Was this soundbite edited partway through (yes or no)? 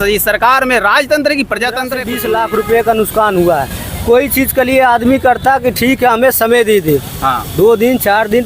yes